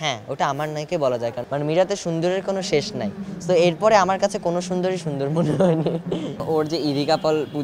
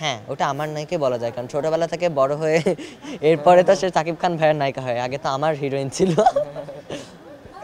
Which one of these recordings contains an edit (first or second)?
first